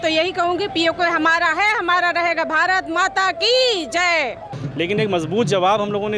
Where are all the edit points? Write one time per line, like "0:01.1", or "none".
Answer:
0:04.6